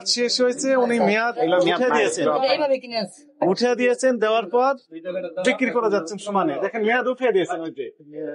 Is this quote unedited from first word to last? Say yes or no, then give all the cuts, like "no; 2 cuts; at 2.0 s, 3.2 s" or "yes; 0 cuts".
yes; 0 cuts